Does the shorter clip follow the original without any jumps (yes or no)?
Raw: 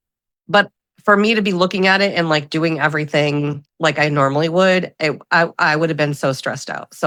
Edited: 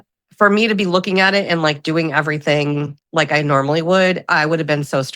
no